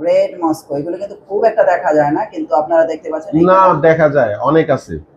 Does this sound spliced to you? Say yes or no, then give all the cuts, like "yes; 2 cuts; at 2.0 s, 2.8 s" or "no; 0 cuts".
no; 0 cuts